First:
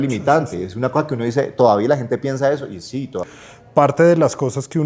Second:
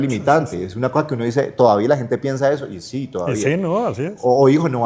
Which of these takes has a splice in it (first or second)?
first